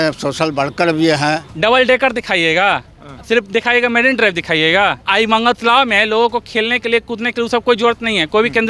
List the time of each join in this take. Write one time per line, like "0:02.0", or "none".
0:01.5
0:05.0